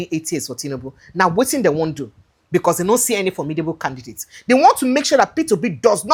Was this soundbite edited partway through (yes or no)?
no